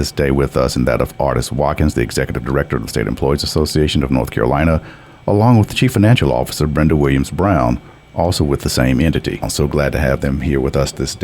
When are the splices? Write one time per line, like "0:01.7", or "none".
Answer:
0:09.5